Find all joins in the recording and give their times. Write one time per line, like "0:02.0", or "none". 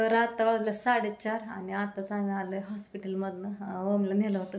none